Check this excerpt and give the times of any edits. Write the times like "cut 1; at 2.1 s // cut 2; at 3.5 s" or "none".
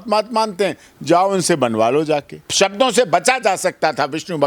cut 1; at 2.4 s